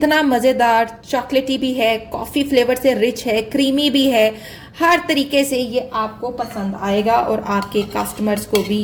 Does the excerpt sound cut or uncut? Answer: uncut